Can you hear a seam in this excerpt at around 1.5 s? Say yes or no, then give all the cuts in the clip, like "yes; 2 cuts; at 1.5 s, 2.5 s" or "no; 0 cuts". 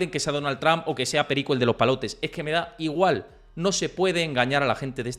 no; 0 cuts